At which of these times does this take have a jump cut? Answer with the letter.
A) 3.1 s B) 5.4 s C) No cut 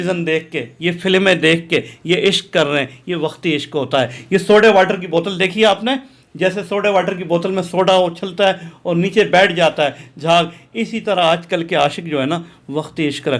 C